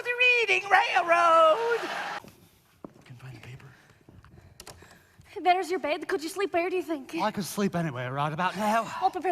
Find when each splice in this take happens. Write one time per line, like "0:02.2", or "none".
0:02.2

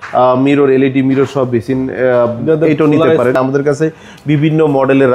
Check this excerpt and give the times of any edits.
0:03.4

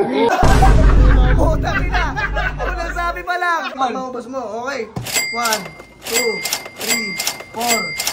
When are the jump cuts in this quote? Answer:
0:03.8

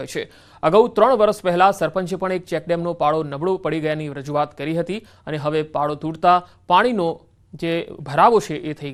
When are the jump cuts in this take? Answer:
none

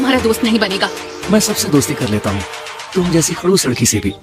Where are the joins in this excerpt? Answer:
none

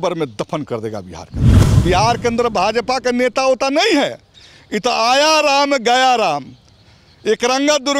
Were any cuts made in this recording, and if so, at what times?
0:01.6

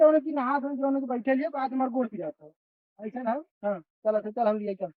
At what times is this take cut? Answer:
none

